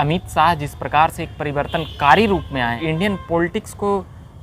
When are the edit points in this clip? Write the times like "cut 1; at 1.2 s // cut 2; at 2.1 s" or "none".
cut 1; at 2.8 s